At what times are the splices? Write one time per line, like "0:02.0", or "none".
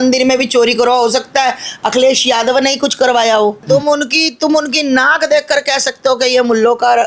0:03.6